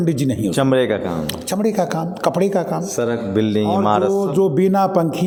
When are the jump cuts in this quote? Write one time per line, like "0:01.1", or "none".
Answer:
none